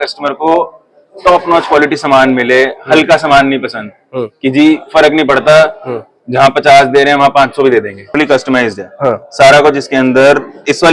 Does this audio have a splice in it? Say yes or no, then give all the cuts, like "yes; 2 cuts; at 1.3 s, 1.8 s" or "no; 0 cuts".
yes; 1 cut; at 8.2 s